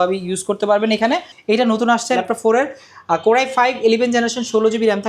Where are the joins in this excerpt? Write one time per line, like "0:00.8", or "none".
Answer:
0:01.3